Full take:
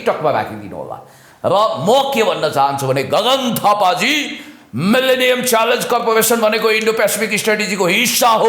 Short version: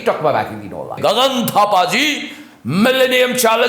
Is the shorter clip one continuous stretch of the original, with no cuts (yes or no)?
no